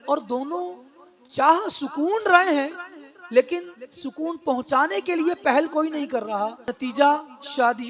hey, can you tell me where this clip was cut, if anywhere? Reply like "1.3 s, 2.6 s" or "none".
6.8 s